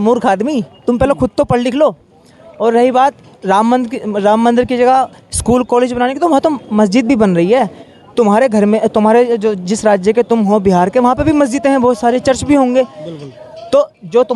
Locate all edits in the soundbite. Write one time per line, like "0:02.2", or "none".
none